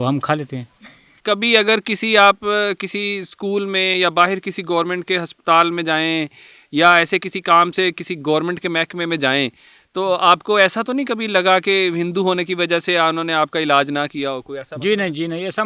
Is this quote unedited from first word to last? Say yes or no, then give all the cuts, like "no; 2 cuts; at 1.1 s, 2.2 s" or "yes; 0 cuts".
no; 1 cut; at 1.2 s